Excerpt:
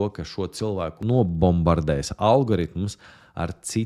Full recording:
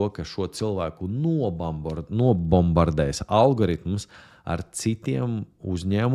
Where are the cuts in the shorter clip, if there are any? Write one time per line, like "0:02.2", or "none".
0:01.0